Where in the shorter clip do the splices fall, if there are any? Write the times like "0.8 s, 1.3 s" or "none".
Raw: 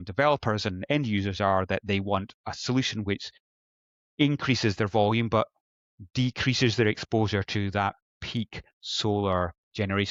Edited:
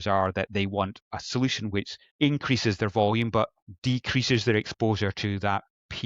2.0 s, 3.7 s